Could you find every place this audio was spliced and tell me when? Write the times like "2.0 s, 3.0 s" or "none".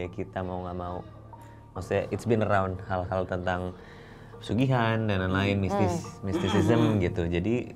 none